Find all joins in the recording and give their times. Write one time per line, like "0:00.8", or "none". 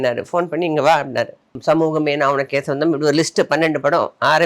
0:01.5